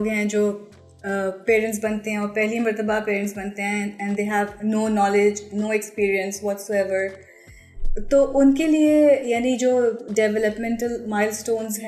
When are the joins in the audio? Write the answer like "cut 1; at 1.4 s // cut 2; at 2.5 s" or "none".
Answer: none

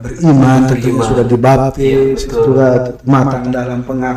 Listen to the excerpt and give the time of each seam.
none

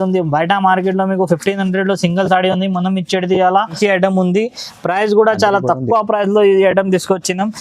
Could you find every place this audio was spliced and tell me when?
cut 1; at 3.7 s

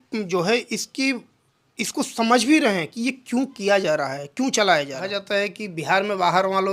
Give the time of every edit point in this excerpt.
cut 1; at 5.1 s

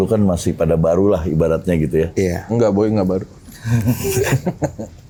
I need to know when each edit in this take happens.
none

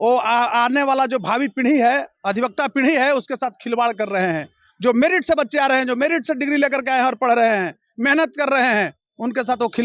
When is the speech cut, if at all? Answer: none

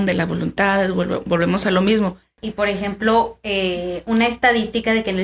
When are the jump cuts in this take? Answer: cut 1; at 2.4 s

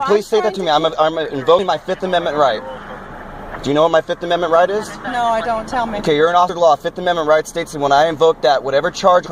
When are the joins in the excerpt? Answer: cut 1; at 1.6 s

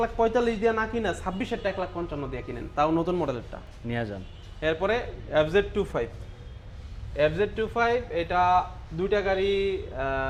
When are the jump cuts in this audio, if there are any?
none

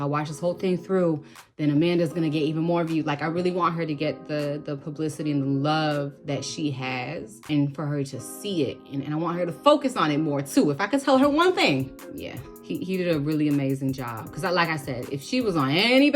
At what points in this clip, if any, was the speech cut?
cut 1; at 12.0 s

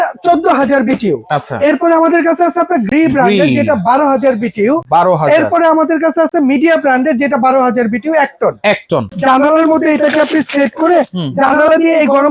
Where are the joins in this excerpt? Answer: cut 1; at 9.1 s

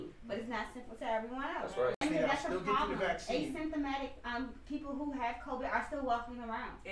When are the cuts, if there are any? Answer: cut 1; at 2.0 s

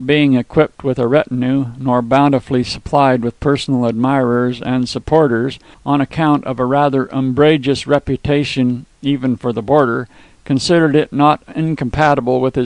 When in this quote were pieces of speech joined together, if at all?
none

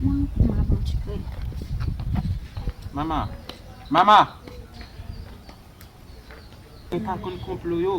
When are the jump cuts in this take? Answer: cut 1; at 6.9 s

